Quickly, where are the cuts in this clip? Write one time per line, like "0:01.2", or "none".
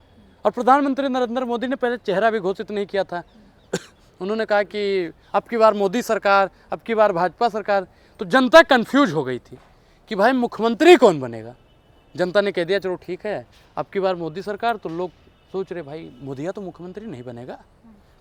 none

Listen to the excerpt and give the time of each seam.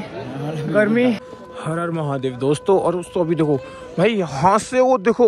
0:01.3

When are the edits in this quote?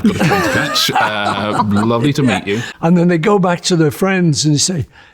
0:02.7

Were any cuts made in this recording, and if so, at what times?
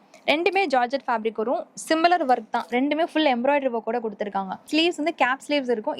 0:04.6

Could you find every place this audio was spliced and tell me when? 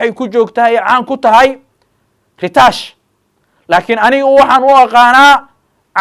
none

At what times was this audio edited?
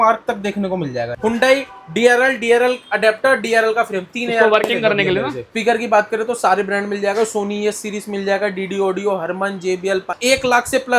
0:01.1
0:05.4
0:10.2

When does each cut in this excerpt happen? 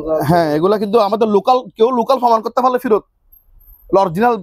none

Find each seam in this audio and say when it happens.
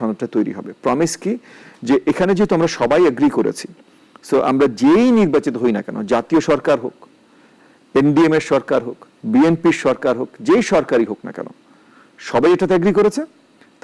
none

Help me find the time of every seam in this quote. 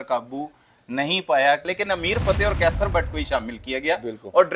0:01.7

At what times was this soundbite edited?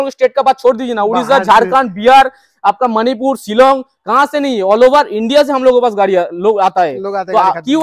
none

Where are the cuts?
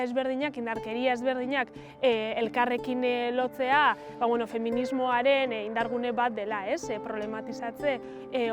none

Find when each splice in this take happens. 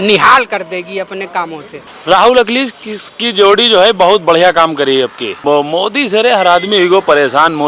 0:01.7
0:05.4

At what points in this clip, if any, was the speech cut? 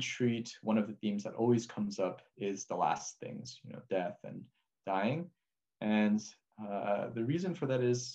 0:02.3

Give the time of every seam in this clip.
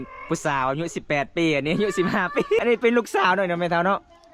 0:02.6

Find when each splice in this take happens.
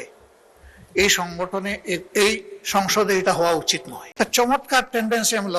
0:04.2

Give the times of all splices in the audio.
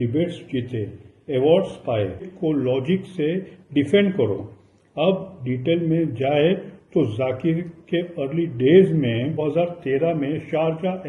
0:02.3
0:09.4

